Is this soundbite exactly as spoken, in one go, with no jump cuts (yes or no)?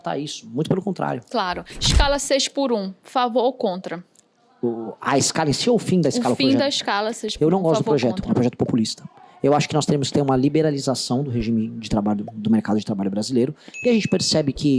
no